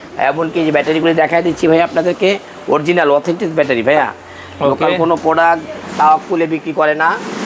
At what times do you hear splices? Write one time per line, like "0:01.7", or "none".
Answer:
none